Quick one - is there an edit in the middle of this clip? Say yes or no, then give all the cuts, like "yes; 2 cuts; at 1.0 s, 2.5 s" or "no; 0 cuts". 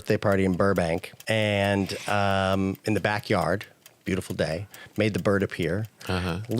yes; 1 cut; at 1.1 s